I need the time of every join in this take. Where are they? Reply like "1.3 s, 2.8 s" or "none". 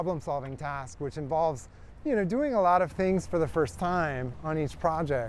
none